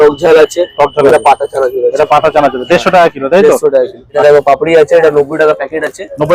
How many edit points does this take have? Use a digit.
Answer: 1